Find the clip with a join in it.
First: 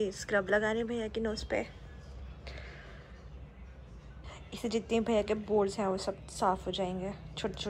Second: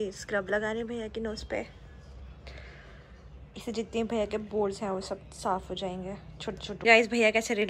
second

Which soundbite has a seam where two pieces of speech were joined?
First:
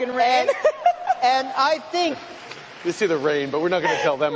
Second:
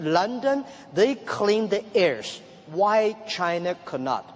second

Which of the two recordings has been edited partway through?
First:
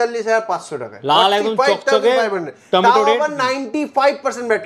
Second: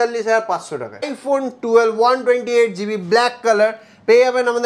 second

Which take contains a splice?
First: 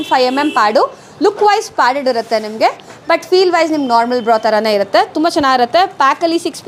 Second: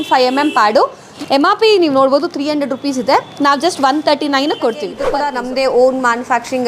second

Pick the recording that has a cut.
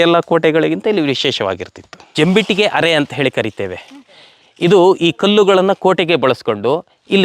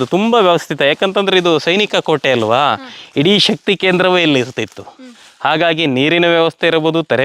first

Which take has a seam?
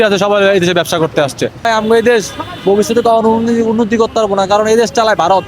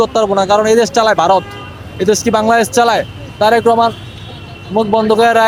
first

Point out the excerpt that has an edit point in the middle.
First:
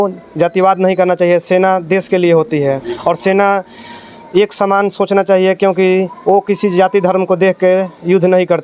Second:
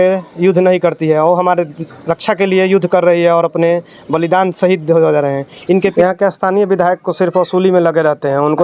second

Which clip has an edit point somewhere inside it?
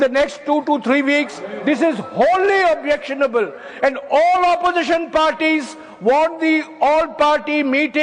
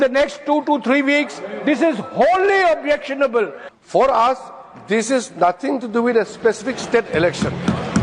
second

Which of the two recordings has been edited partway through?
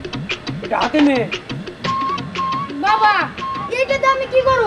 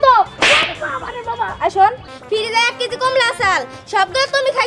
second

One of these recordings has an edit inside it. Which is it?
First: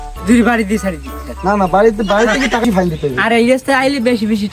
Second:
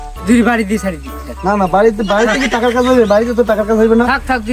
first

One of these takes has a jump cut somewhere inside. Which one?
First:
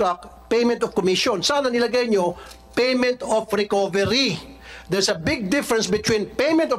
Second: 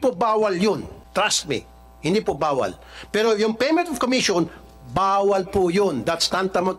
second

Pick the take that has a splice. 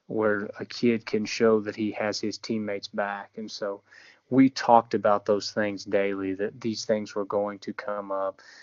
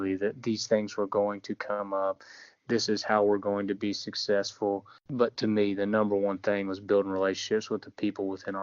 second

